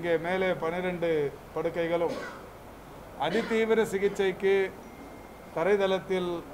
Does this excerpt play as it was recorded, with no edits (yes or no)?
yes